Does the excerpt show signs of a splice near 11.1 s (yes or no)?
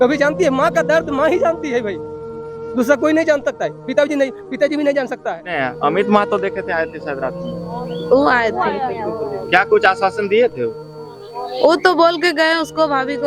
no